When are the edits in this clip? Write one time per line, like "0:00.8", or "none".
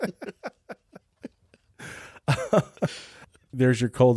0:03.3